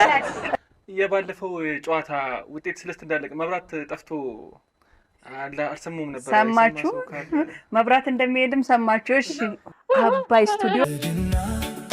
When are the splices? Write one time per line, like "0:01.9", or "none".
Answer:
0:10.8